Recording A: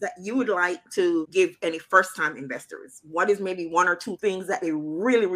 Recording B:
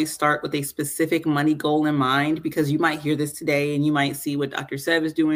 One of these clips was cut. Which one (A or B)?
A